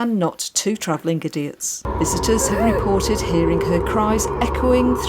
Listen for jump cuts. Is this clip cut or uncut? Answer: cut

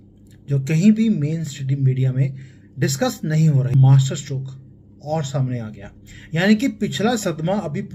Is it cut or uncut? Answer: cut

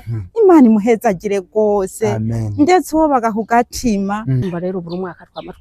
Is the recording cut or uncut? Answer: cut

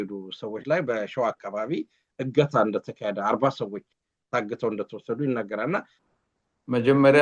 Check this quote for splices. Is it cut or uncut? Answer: cut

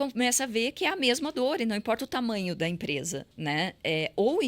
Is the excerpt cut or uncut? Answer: cut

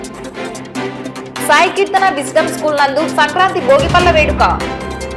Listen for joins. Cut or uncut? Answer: uncut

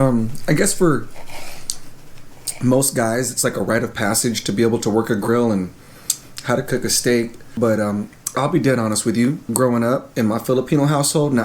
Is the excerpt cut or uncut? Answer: cut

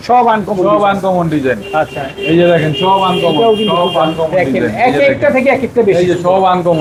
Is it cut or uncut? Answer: uncut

